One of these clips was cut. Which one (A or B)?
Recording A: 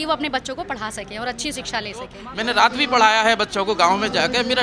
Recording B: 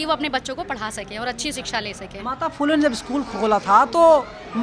A